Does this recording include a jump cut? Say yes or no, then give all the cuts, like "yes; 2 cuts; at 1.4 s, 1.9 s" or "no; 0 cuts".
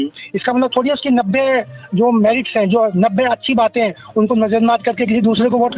no; 0 cuts